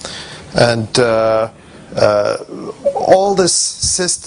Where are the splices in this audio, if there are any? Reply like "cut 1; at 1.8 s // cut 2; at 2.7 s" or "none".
cut 1; at 1.0 s